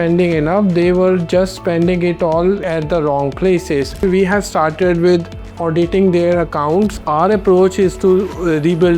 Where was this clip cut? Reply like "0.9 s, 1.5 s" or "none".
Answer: 4.0 s, 6.9 s

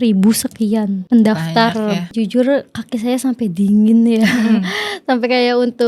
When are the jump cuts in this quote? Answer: 1.0 s, 2.1 s

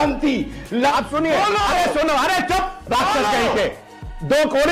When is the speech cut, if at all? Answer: 0.9 s

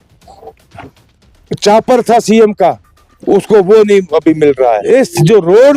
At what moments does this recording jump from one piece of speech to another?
4.8 s

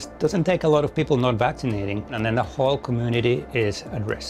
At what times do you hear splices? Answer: 2.2 s

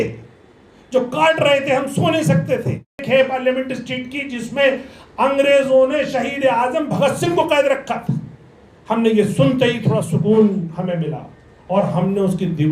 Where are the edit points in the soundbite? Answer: 3.0 s

